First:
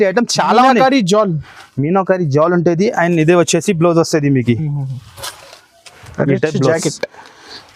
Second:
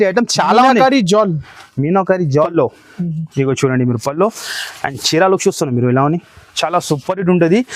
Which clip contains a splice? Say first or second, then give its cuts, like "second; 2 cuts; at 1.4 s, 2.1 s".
second; 1 cut; at 2.5 s